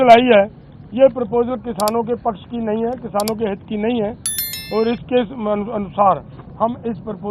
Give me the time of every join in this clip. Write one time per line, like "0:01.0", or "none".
none